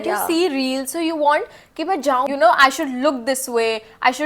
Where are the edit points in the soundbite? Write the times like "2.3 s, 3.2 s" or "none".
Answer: 2.3 s